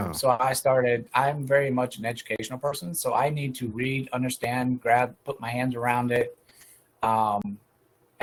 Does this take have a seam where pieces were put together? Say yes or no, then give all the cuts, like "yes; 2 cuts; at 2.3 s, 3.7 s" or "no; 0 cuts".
no; 0 cuts